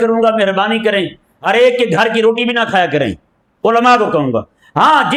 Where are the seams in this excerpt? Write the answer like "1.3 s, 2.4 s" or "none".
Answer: none